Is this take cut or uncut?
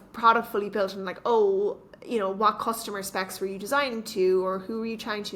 uncut